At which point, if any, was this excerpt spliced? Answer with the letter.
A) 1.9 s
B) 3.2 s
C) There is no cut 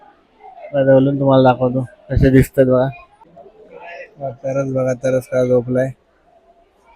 B